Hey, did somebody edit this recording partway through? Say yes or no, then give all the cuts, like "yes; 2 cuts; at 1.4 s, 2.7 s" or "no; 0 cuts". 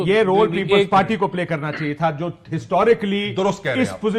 no; 0 cuts